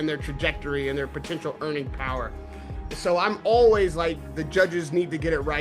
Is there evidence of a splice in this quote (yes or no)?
no